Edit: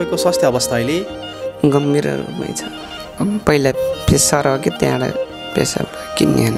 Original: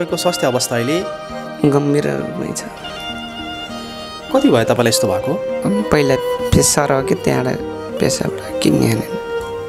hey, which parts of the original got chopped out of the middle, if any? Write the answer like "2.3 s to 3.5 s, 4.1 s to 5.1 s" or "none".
3.1 s to 5.6 s

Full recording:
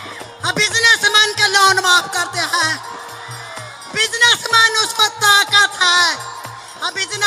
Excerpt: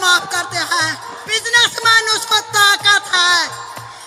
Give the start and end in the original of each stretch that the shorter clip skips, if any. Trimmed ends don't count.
3.0 s to 3.8 s

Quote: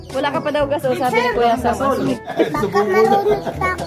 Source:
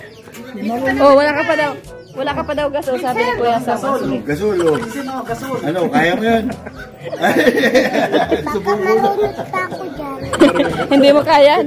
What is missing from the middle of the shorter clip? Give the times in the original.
4.4 s to 8.2 s

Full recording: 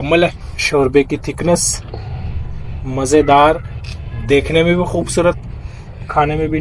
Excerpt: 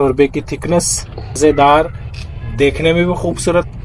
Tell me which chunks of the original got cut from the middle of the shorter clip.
2.1 s to 3.1 s

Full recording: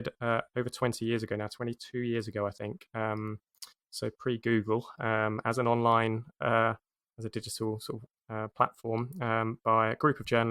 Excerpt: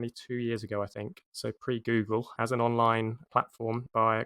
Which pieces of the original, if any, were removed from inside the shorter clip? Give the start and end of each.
2.8 s to 3.8 s, 4.9 s to 5.4 s, 6.4 s to 9.1 s

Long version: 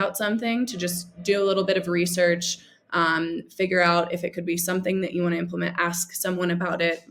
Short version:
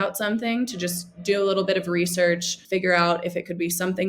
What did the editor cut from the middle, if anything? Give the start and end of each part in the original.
2.6 s to 3.4 s

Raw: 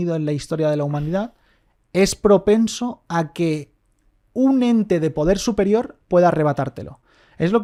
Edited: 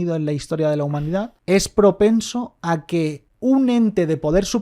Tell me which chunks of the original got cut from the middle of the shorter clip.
1.3 s to 1.8 s, 3.7 s to 4.2 s

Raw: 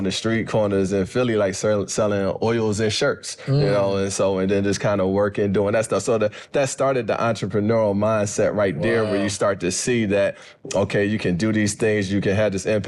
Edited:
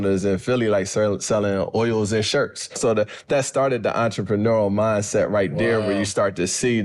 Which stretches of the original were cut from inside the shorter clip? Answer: 3.5 s to 6.0 s

